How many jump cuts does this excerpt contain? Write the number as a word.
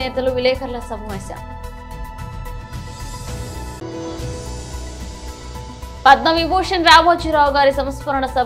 three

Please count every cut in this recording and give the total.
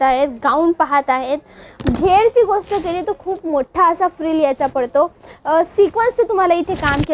zero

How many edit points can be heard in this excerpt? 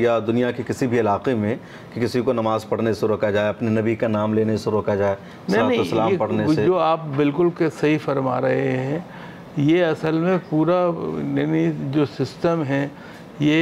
zero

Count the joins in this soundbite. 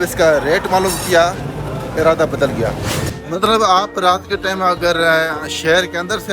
one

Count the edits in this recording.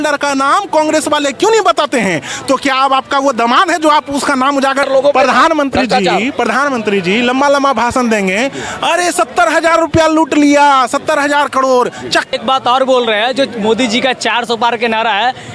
two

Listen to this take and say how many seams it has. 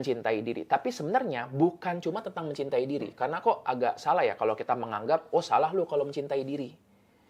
zero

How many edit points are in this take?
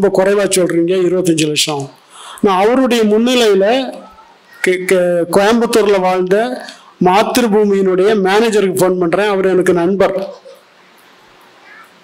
zero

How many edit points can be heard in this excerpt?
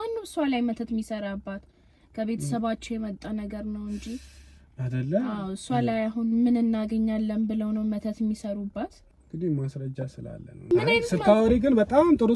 two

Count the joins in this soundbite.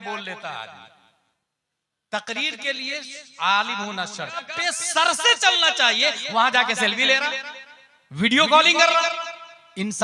one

